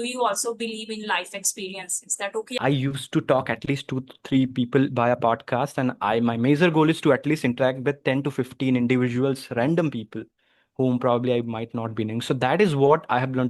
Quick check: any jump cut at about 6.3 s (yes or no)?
no